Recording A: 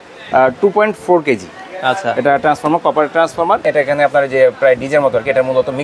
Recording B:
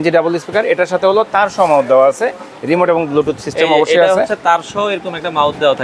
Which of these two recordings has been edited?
A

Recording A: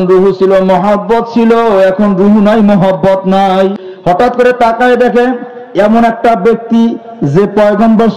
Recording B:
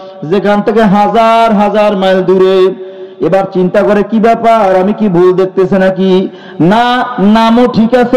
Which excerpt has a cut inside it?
A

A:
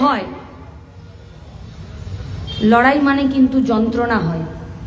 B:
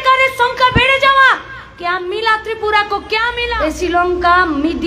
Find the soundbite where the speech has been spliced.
B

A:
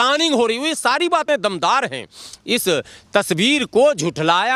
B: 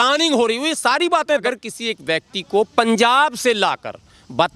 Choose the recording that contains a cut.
B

